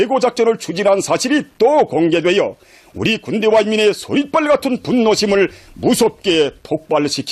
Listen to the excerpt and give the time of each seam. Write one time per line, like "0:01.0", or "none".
none